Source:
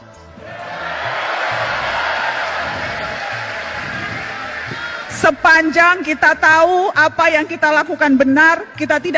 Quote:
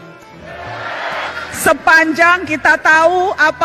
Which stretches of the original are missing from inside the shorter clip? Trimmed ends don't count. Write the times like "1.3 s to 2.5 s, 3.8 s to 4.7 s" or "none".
1.3 s to 4.9 s